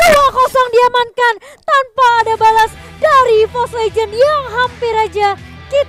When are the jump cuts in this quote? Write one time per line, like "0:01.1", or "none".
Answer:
none